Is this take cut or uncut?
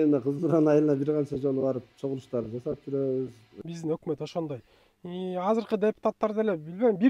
cut